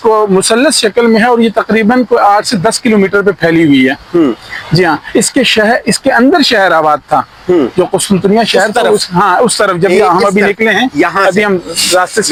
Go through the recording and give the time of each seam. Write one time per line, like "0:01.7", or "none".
none